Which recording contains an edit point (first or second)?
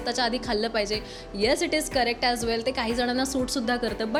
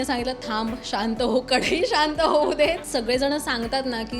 second